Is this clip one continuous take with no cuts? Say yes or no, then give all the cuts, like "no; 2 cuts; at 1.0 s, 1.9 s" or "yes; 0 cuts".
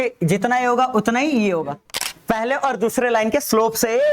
no; 1 cut; at 2.1 s